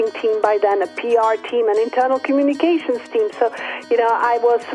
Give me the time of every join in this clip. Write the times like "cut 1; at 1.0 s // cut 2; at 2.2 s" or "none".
none